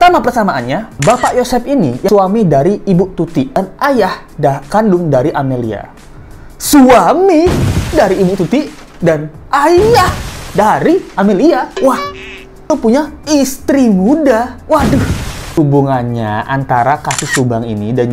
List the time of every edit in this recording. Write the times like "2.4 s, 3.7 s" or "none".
2.1 s, 3.6 s, 12.7 s, 15.5 s